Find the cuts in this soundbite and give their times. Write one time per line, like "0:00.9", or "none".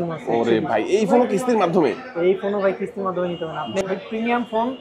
0:03.8